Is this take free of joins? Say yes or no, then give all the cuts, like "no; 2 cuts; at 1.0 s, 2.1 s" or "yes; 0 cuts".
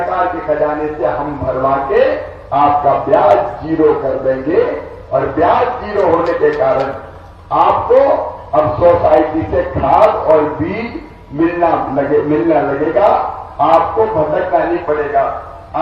yes; 0 cuts